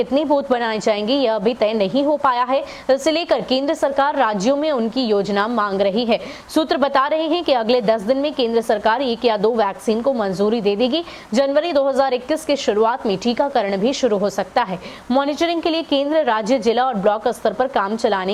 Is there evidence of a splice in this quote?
no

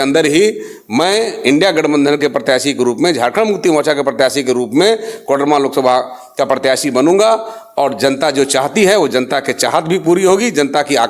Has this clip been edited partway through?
no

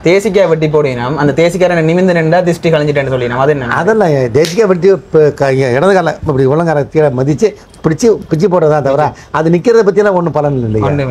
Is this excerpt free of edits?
yes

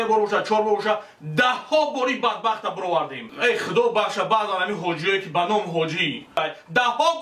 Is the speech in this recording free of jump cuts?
no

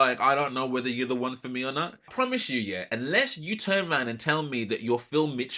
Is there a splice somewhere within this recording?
yes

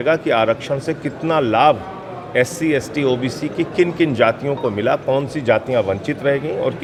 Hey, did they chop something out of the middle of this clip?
no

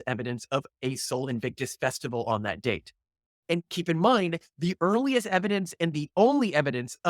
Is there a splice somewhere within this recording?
yes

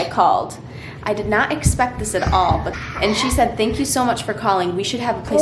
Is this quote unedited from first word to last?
no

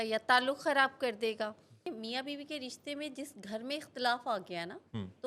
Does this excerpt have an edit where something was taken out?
yes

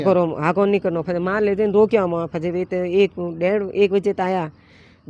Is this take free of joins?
yes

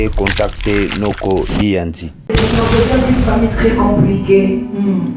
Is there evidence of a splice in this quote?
yes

